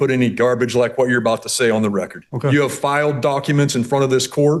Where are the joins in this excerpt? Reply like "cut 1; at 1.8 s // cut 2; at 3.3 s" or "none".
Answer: none